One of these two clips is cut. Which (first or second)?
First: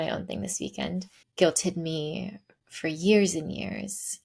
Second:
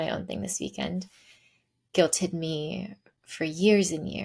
first